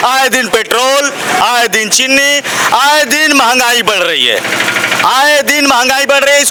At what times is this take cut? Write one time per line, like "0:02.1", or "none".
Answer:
none